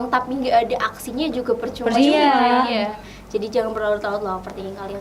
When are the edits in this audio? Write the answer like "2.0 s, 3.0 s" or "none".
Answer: none